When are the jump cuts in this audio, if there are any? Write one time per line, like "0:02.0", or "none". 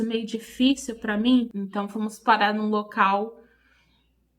0:01.5